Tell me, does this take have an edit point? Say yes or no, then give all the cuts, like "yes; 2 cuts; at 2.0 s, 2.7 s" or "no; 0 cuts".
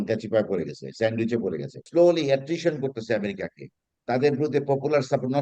yes; 1 cut; at 1.8 s